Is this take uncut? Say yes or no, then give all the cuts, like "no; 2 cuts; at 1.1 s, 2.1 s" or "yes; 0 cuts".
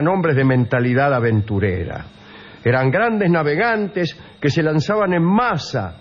no; 1 cut; at 1.5 s